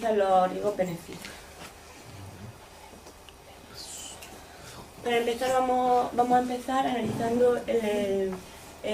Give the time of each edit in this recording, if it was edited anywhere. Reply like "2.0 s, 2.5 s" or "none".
5.4 s